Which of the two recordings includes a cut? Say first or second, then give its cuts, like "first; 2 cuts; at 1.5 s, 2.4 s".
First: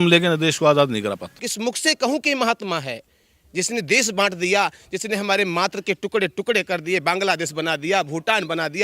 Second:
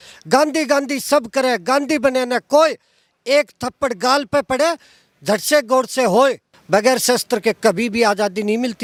first; 1 cut; at 1.3 s